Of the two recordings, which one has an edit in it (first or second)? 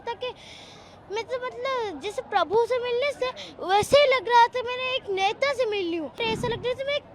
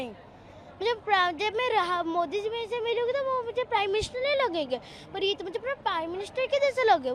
first